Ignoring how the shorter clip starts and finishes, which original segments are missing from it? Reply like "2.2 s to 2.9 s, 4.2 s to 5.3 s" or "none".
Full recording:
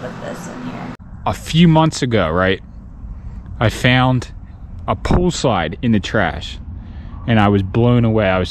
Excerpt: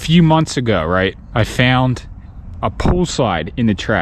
2.7 s to 3.5 s